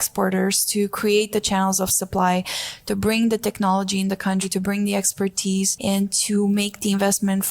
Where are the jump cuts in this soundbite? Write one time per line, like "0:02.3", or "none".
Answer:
0:04.5
0:05.7